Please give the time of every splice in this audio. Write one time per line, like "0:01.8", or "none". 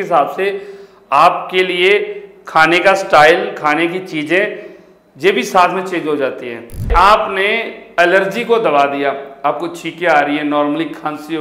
0:06.9